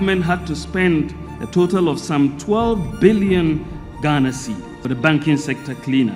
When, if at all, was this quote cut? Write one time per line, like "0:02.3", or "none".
none